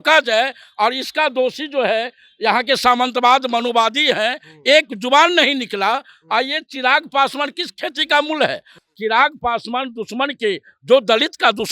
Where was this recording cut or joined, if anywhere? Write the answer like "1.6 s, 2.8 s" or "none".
8.8 s